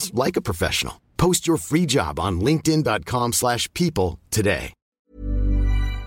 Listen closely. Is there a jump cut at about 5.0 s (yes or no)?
yes